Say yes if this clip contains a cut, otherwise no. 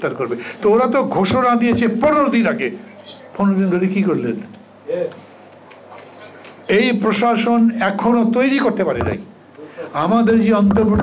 no